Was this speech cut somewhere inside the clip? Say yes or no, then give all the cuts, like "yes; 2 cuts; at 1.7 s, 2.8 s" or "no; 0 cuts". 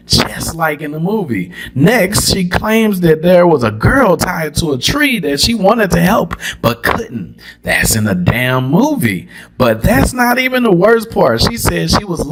no; 0 cuts